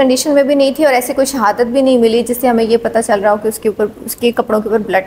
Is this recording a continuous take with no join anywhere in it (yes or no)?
yes